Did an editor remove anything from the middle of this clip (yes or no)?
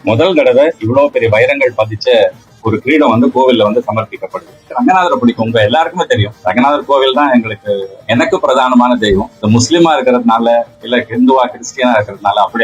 yes